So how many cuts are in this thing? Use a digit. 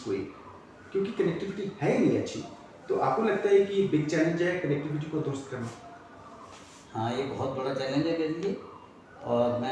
0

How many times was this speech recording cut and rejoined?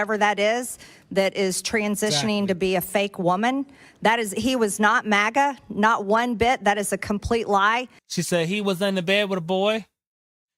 1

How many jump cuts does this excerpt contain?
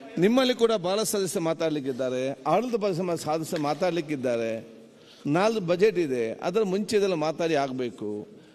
0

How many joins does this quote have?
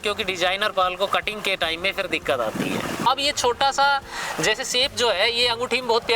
1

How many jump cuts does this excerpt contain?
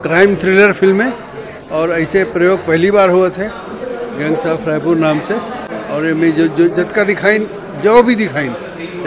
0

